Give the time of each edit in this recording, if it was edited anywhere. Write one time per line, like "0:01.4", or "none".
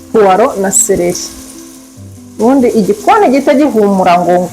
none